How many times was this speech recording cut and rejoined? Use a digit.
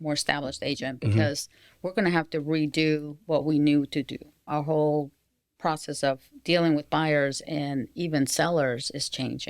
1